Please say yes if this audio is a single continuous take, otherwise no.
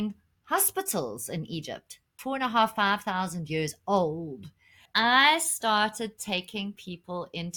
no